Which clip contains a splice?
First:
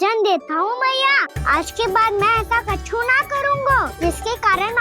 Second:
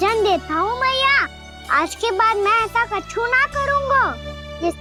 first; 2 cuts; at 1.3 s, 3.9 s

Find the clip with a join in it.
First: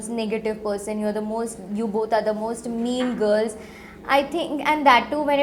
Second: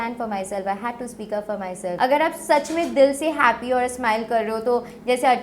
second; 1 cut; at 2.0 s

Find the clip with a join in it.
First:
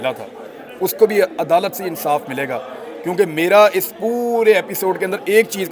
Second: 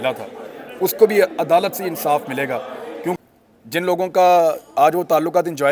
second; 1 cut; at 3.2 s

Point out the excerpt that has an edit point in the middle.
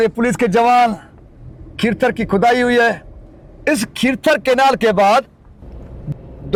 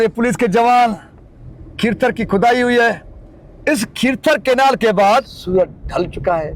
second; 1 cut; at 5.4 s

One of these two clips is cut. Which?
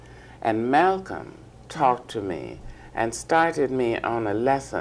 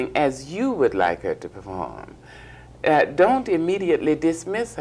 first; 1 cut; at 2.0 s

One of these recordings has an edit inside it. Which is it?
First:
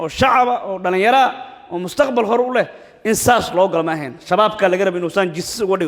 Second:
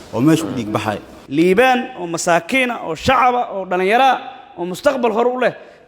second; 1 cut; at 1.1 s

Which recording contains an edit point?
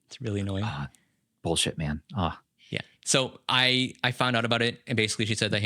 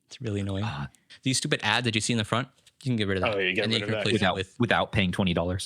second; 1 cut; at 1.1 s

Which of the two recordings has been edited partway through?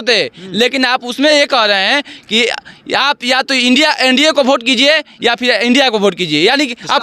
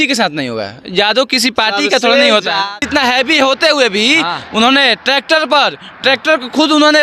second; 1 cut; at 2.8 s

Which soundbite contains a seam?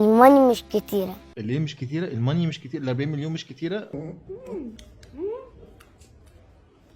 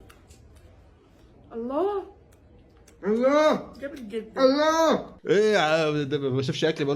first; 1 cut; at 3.9 s

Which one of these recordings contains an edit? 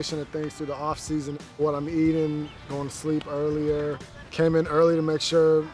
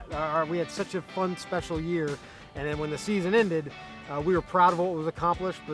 first; 2 cuts; at 1.5 s, 4.1 s

